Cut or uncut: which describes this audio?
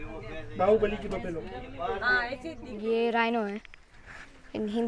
cut